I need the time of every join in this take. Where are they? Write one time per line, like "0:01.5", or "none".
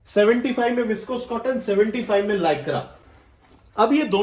none